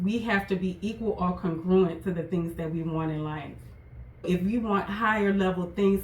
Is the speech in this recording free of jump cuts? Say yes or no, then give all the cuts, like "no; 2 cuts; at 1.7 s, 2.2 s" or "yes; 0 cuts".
no; 1 cut; at 4.3 s